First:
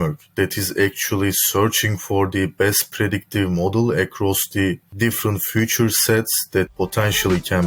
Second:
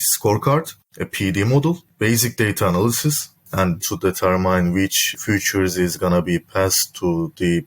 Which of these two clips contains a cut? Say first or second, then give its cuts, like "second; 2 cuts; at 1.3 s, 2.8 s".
second; 3 cuts; at 1.9 s, 3.8 s, 5.1 s